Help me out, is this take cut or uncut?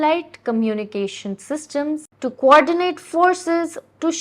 cut